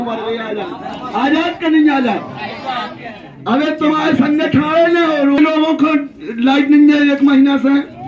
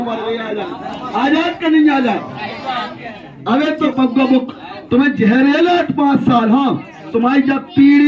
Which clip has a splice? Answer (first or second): second